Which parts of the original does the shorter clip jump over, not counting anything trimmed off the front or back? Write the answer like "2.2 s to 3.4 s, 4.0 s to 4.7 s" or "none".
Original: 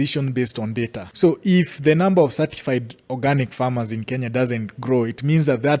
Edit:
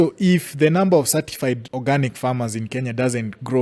2.9 s to 3.1 s